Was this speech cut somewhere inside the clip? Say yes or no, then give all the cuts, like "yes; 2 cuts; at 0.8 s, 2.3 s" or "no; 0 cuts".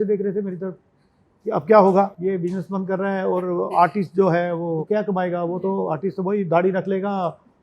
yes; 2 cuts; at 2.2 s, 4.8 s